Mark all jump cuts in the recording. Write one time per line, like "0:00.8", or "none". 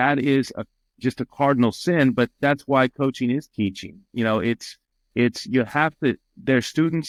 none